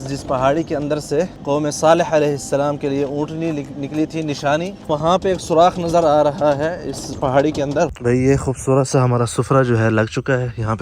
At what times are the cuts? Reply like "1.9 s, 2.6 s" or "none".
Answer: 1.4 s, 4.8 s, 7.9 s